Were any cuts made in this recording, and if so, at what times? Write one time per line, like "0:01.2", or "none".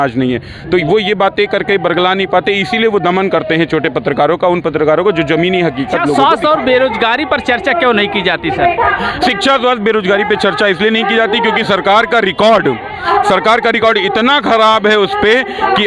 0:06.1